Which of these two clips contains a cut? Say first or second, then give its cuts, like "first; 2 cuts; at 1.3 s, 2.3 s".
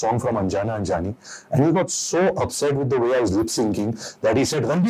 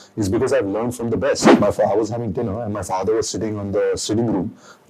second; 1 cut; at 1.5 s